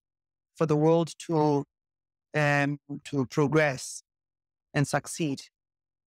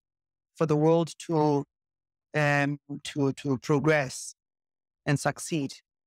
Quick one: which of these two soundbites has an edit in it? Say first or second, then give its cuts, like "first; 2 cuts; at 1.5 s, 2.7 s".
first; 1 cut; at 3.1 s